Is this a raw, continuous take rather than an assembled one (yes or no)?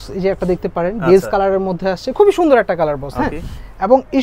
yes